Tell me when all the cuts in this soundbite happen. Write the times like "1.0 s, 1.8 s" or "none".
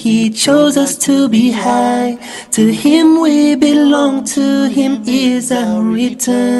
1.7 s